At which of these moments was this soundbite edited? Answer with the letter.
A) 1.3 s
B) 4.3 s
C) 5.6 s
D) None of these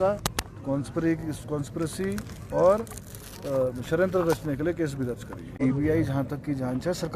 C